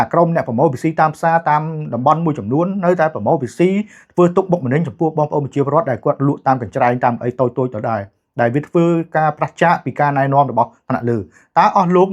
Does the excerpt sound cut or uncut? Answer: uncut